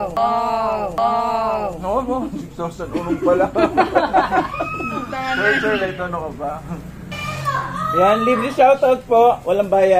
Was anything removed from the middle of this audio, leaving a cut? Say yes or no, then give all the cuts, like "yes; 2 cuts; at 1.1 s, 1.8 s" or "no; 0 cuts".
no; 0 cuts